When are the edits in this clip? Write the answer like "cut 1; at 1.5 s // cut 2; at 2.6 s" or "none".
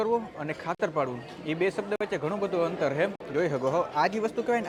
none